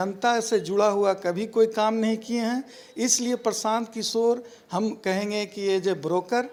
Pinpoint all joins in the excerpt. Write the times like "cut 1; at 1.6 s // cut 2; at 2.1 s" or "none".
none